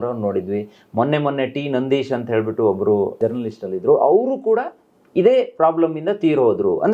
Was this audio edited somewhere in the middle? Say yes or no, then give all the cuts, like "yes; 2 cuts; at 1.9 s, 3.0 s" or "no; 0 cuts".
no; 0 cuts